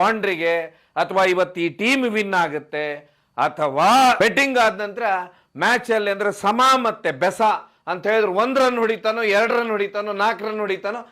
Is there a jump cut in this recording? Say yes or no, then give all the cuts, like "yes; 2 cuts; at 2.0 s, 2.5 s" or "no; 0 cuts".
yes; 1 cut; at 4.2 s